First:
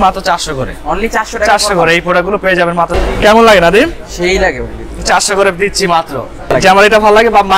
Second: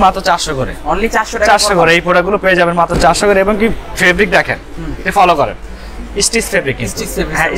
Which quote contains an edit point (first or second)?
first